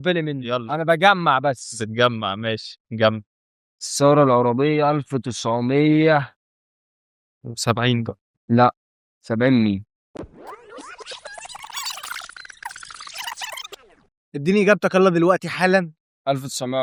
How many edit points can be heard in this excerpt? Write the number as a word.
zero